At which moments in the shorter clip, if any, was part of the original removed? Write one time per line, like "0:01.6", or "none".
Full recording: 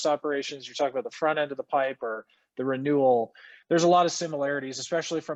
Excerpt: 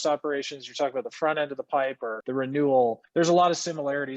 0:02.1
0:03.0